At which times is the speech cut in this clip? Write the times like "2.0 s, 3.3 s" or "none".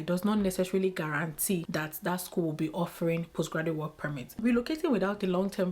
1.7 s, 4.3 s